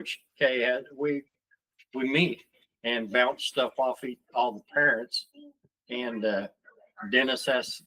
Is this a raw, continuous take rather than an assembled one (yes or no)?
yes